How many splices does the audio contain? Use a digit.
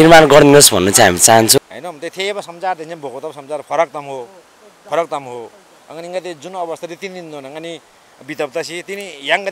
1